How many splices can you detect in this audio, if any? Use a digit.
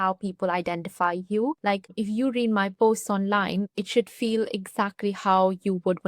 2